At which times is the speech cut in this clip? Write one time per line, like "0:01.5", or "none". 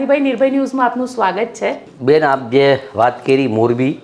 0:01.9